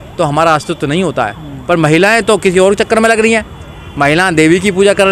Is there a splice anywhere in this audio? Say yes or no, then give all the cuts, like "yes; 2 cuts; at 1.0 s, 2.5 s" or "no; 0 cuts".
no; 0 cuts